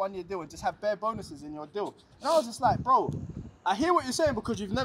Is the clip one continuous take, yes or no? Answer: yes